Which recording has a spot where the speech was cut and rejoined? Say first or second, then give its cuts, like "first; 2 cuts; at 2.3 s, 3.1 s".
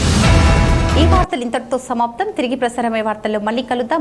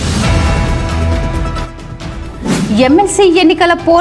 second; 1 cut; at 0.9 s